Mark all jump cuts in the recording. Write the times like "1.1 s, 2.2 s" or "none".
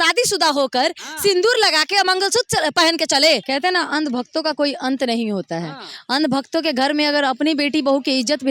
3.4 s